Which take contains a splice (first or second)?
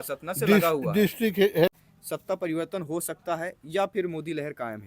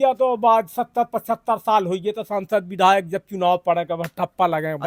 first